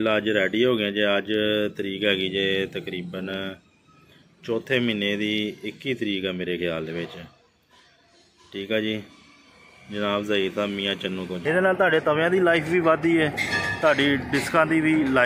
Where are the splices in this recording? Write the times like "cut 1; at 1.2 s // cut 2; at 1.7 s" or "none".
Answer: cut 1; at 11.3 s

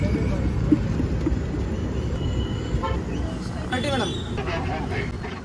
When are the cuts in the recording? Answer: cut 1; at 2.1 s // cut 2; at 4.4 s

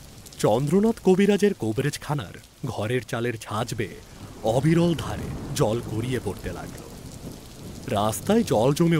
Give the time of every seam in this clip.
cut 1; at 6.6 s // cut 2; at 7.8 s

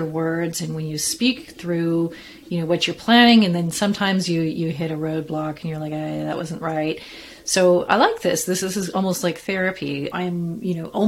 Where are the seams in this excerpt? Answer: cut 1; at 8.6 s // cut 2; at 10.1 s

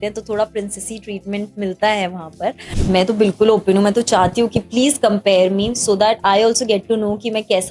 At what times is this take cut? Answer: cut 1; at 2.7 s

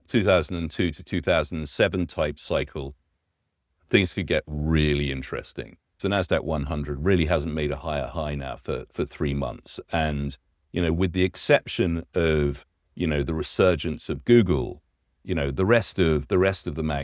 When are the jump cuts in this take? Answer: cut 1; at 6.0 s

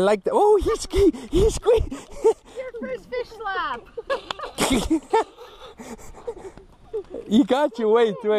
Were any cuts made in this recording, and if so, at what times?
cut 1; at 1.2 s

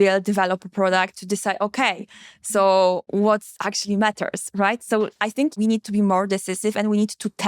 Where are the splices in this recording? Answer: cut 1; at 3.0 s // cut 2; at 5.5 s

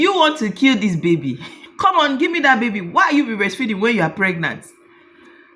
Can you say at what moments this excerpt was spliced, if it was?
cut 1; at 1.7 s

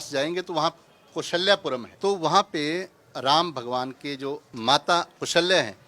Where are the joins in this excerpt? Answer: cut 1; at 1.9 s // cut 2; at 4.5 s

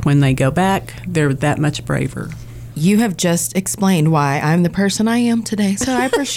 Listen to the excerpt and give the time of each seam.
cut 1; at 2.7 s

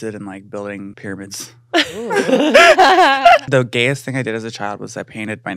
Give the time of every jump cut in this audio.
cut 1; at 0.9 s // cut 2; at 3.4 s

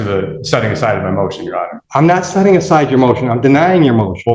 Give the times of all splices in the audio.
cut 1; at 1.8 s

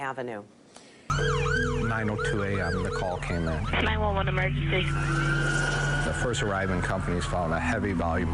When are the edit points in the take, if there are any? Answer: cut 1; at 1.1 s

